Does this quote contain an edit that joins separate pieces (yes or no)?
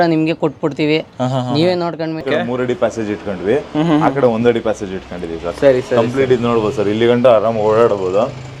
yes